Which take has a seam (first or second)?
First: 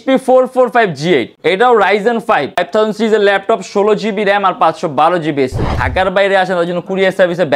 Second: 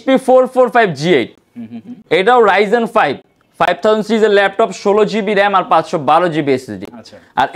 first